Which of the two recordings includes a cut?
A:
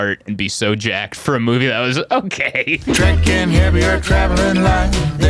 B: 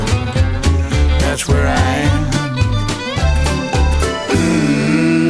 A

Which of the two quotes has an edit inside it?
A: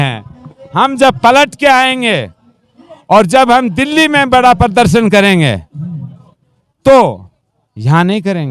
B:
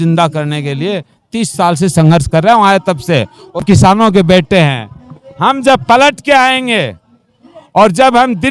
B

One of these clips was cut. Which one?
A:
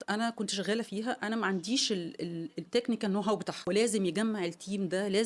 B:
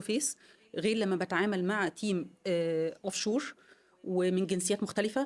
A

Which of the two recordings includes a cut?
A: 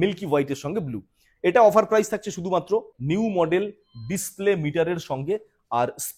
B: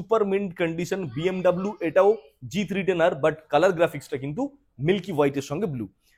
A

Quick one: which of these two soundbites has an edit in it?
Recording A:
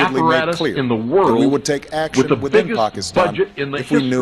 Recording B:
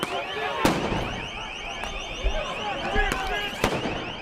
A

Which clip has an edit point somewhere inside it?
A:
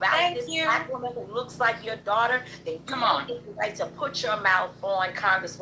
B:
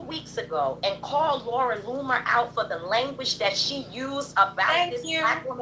A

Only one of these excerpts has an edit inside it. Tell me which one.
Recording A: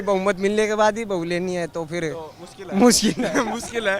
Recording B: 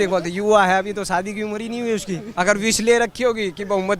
B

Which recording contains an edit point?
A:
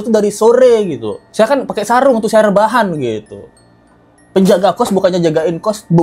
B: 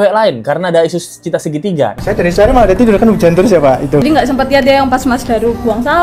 B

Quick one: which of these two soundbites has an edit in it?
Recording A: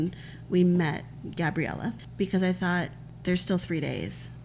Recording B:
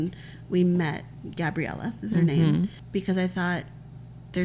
A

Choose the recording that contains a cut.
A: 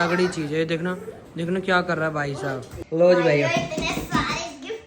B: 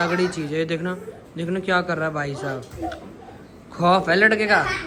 A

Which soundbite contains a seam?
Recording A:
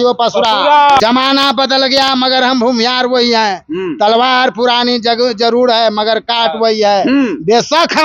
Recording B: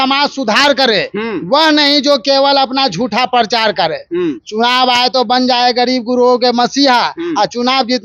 A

